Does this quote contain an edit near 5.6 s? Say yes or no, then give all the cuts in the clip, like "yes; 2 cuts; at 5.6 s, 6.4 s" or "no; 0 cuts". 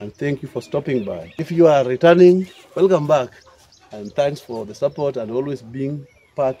no; 1 cut; at 1.3 s